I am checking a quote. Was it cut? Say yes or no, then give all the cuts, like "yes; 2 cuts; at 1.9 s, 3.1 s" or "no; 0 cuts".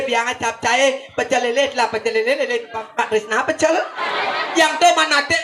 yes; 1 cut; at 4.0 s